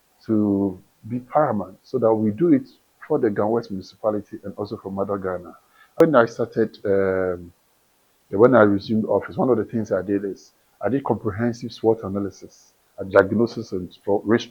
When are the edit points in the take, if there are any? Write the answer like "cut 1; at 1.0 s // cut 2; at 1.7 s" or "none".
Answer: cut 1; at 6.0 s